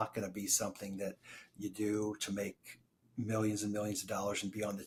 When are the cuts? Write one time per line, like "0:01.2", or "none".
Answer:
none